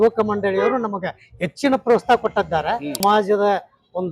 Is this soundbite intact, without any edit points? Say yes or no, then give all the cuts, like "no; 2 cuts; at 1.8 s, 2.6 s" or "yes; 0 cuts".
no; 1 cut; at 3.0 s